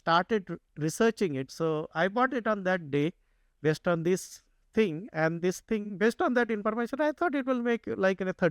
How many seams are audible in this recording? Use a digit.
1